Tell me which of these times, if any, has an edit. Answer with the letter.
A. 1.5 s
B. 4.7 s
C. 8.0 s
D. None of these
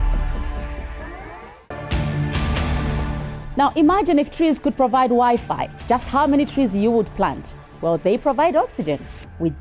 A